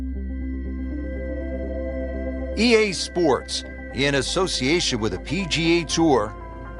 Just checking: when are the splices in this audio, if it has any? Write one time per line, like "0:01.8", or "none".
0:02.6